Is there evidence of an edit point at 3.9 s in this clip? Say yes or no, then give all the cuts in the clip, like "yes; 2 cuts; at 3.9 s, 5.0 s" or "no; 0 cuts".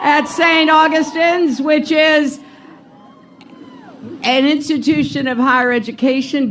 yes; 1 cut; at 3.9 s